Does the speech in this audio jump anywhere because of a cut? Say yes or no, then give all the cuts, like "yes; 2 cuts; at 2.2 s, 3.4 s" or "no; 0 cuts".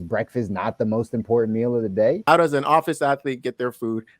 yes; 1 cut; at 2.2 s